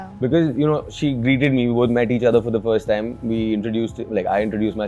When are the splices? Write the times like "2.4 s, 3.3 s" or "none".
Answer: none